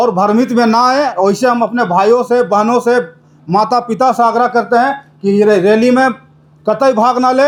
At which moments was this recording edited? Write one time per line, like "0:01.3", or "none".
none